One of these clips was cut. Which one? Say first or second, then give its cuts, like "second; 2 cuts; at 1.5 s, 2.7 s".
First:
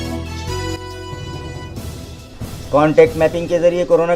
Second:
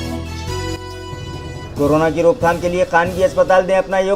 second; 1 cut; at 1.6 s